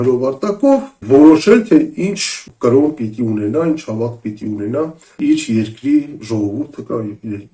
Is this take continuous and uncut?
no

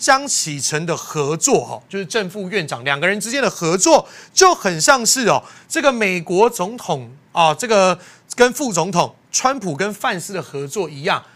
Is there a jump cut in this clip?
no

